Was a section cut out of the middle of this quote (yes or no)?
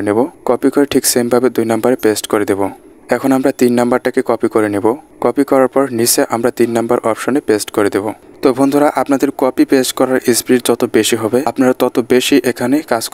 yes